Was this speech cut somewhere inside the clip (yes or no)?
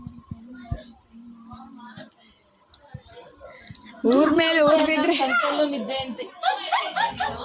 no